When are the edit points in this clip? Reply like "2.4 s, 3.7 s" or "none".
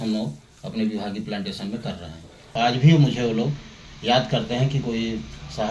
2.5 s